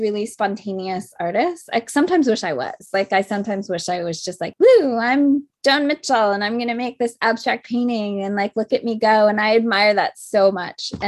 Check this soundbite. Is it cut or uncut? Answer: cut